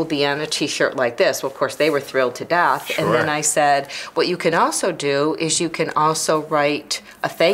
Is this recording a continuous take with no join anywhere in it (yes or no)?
yes